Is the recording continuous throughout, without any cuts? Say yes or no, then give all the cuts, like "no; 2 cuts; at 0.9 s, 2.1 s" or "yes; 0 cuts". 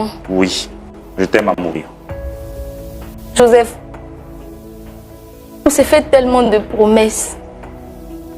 no; 3 cuts; at 1.9 s, 3.3 s, 7.2 s